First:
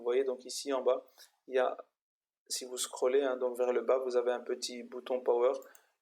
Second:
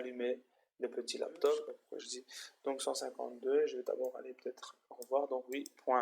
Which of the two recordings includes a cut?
second; 1 cut; at 1.8 s

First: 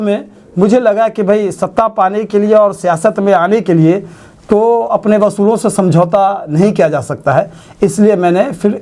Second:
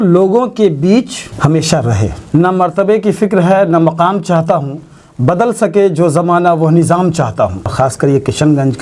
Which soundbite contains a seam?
second; 2 cuts; at 2.2 s, 7.7 s

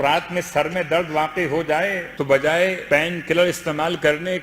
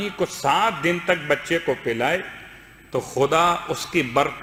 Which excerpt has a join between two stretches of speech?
first; 2 cuts; at 2.1 s, 2.8 s

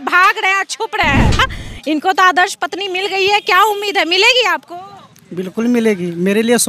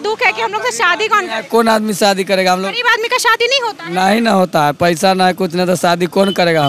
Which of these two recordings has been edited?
first; 1 cut; at 1.5 s

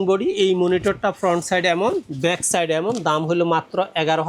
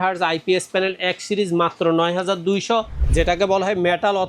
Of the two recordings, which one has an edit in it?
second; 1 cut; at 3.0 s

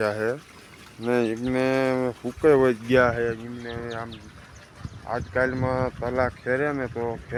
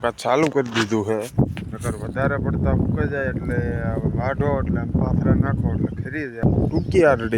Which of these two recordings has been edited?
second; 1 cut; at 6.4 s

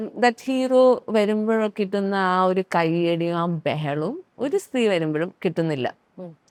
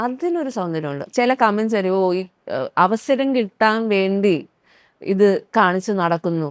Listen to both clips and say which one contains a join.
second; 1 cut; at 1.0 s

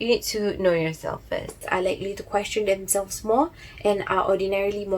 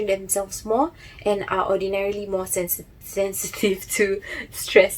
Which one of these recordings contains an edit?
first; 1 cut; at 1.6 s

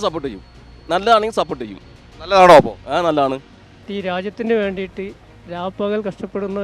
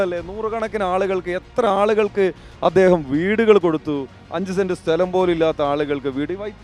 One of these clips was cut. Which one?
first; 1 cut; at 3.8 s

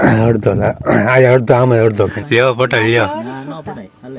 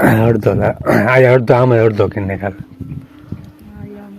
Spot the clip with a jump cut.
first; 1 cut; at 2.2 s

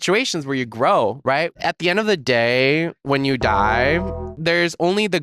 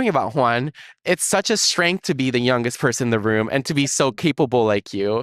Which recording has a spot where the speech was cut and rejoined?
first; 1 cut; at 1.5 s

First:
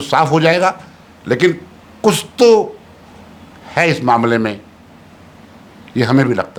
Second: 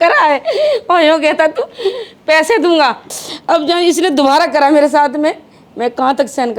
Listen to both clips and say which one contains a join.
second; 1 cut; at 3.0 s

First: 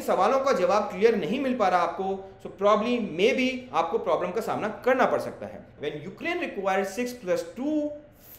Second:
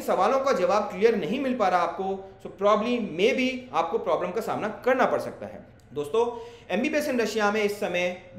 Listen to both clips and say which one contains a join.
first; 1 cut; at 5.7 s

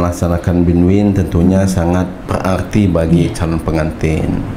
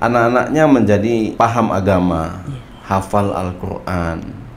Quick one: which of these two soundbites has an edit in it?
first; 1 cut; at 2.2 s

